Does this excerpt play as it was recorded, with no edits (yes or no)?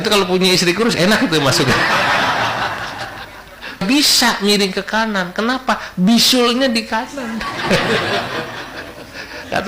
no